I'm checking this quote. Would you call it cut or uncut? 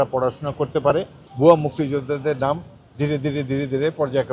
cut